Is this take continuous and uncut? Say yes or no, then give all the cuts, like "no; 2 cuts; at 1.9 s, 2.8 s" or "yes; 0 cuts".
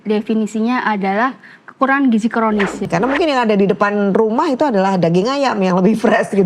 no; 1 cut; at 2.8 s